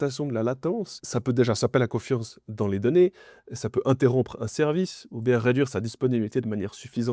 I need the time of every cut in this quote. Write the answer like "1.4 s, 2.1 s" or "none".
1.0 s

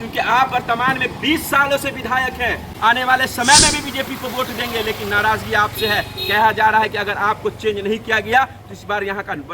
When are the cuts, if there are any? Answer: 2.7 s

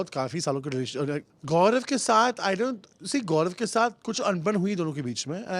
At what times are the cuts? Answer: 1.3 s

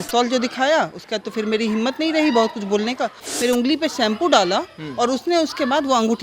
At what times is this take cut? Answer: 3.2 s

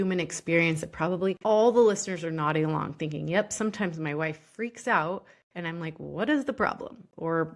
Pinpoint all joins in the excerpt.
1.4 s

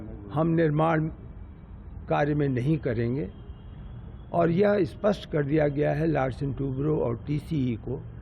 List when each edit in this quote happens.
none

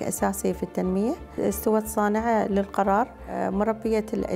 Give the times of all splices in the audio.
1.3 s, 3.4 s

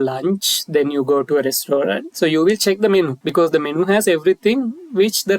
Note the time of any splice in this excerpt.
2.0 s, 3.2 s

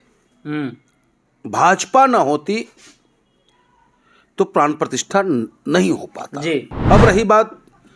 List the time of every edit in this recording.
6.7 s

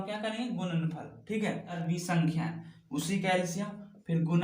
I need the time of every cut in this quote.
1.8 s

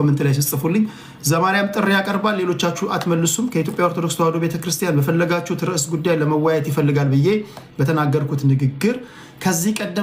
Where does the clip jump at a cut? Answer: none

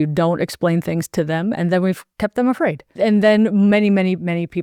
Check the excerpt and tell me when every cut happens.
2.1 s, 2.8 s

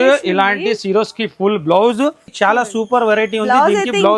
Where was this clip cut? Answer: 2.3 s

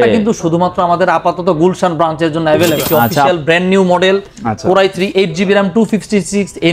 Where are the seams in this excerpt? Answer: 3.3 s

